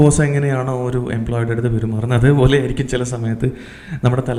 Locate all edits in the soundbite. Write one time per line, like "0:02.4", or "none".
none

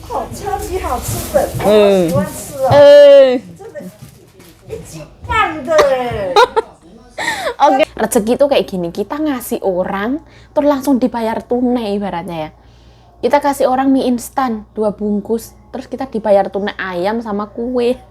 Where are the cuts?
0:07.8

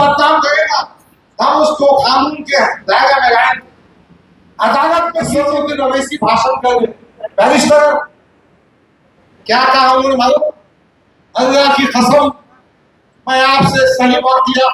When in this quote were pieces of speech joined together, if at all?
0:05.2

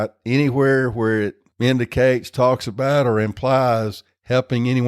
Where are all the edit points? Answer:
0:01.4

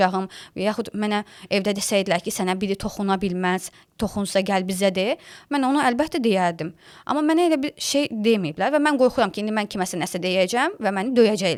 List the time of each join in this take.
none

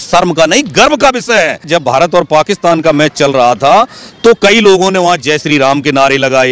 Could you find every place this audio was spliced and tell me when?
0:01.7

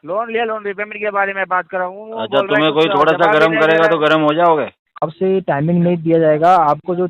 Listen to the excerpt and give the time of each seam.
0:04.9

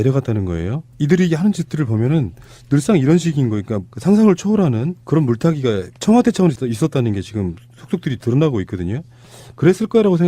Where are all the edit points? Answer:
0:05.9

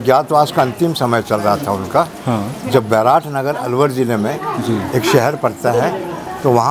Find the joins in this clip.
none

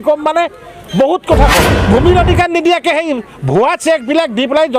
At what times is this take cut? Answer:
0:01.8

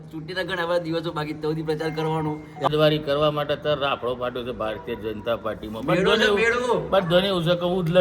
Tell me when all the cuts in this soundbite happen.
0:02.7

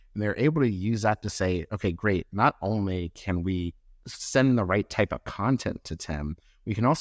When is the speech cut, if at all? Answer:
none

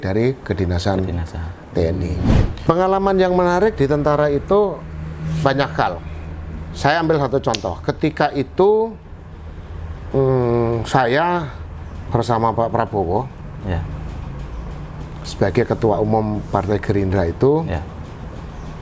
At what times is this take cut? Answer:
0:02.5

